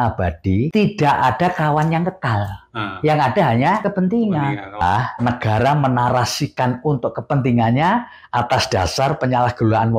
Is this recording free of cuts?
no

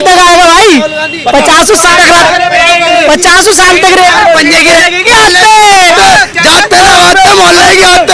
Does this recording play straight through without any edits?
no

